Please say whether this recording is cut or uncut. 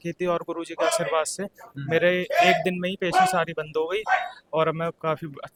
uncut